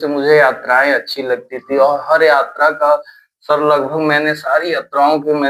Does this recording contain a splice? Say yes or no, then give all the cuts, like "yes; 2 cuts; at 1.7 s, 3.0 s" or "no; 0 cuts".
no; 0 cuts